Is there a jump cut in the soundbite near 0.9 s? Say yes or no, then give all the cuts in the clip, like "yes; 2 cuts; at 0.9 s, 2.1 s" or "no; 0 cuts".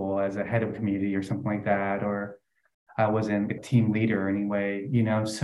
no; 1 cut; at 3.5 s